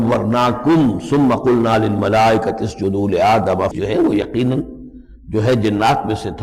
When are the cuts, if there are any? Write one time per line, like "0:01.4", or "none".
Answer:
0:03.7